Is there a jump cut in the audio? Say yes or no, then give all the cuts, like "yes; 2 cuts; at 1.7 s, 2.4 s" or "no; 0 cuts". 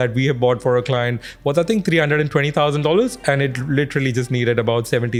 no; 0 cuts